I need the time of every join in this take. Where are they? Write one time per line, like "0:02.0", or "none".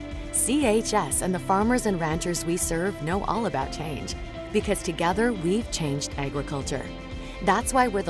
none